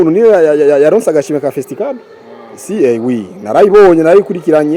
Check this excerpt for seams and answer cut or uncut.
uncut